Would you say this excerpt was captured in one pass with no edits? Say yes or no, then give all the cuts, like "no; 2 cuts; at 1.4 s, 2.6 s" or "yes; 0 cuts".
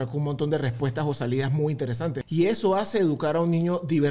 no; 1 cut; at 2.2 s